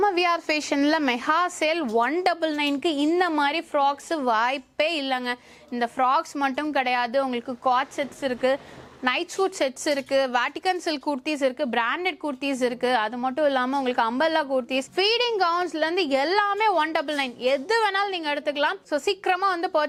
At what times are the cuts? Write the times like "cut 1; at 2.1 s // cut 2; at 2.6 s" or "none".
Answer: none